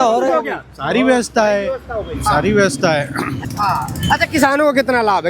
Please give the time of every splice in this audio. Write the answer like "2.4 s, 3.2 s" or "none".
3.3 s